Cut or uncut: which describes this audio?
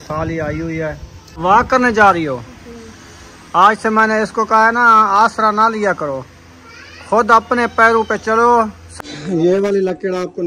cut